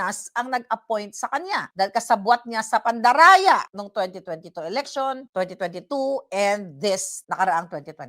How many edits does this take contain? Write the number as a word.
two